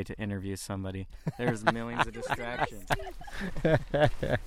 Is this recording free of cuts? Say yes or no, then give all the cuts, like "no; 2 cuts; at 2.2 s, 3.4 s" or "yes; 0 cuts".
yes; 0 cuts